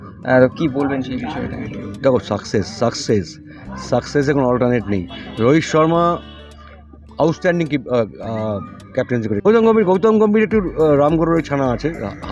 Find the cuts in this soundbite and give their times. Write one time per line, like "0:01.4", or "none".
0:09.5